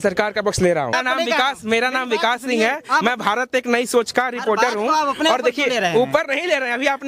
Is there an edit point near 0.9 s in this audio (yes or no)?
yes